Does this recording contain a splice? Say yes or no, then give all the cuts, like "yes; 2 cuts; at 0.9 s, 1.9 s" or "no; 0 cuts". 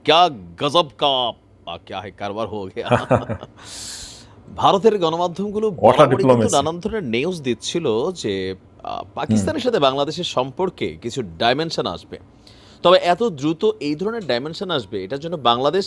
no; 0 cuts